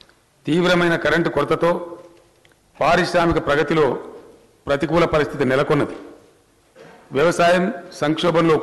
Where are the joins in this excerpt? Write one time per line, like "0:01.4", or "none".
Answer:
0:07.6